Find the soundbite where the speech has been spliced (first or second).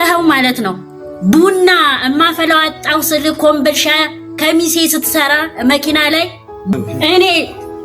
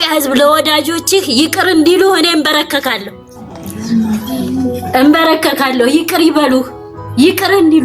first